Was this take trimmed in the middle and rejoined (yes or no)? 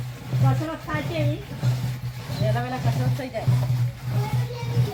no